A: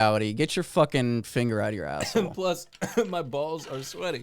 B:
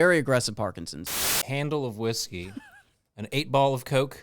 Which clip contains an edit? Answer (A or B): B